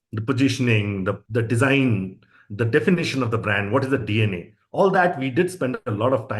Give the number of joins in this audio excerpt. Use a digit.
1